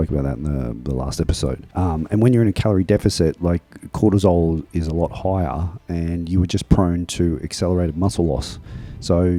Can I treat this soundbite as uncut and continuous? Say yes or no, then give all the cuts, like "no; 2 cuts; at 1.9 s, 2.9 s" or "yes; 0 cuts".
yes; 0 cuts